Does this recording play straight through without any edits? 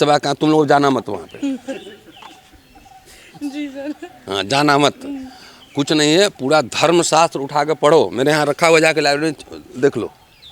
yes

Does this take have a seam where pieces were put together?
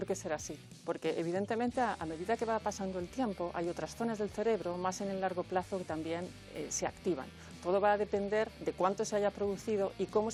no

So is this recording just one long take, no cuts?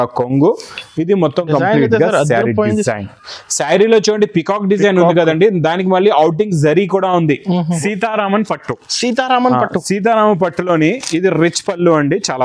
no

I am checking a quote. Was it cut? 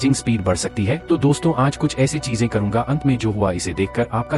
no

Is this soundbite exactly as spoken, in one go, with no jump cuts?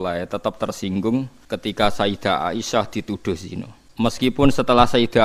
no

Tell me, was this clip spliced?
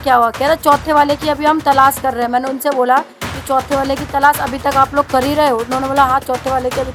no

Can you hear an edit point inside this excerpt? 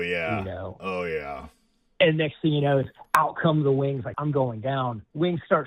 yes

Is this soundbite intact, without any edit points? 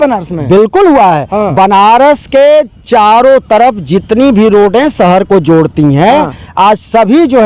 yes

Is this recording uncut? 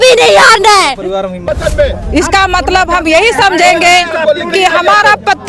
no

